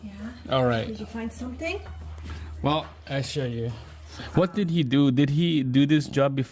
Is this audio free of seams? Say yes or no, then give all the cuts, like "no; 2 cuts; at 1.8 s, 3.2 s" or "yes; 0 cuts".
no; 1 cut; at 4.2 s